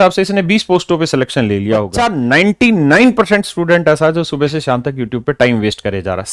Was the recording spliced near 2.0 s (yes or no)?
yes